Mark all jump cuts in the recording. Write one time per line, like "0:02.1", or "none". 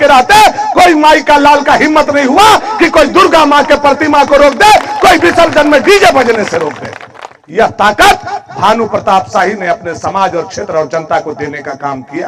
none